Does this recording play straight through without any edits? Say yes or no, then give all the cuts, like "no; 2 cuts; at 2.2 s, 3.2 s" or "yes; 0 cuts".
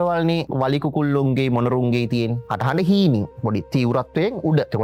yes; 0 cuts